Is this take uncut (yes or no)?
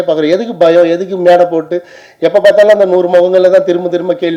yes